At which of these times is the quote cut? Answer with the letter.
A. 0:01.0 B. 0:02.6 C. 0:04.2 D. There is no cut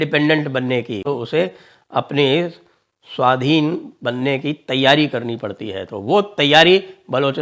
A